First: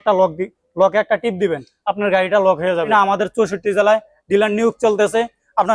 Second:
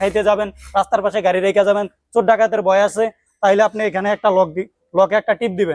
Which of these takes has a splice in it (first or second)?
first